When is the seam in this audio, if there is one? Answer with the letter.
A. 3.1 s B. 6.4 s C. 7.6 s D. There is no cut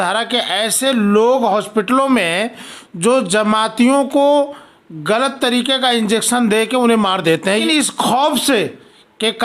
C